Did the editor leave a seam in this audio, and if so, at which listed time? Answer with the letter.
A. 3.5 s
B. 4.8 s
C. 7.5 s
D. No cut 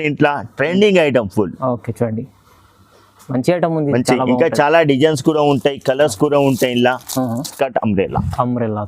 C